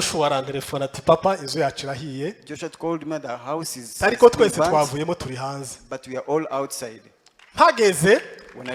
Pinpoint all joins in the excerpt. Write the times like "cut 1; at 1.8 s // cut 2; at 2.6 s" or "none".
none